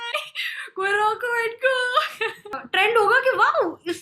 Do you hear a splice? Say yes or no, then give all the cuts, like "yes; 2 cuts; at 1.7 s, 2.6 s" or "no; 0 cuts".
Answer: yes; 1 cut; at 2.6 s